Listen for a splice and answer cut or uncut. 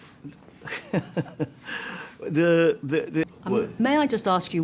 cut